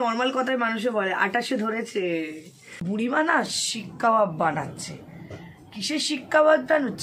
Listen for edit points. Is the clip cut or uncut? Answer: cut